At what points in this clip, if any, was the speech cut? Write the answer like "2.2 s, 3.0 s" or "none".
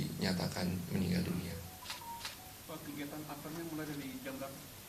none